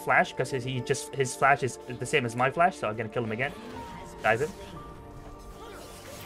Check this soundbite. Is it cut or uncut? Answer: uncut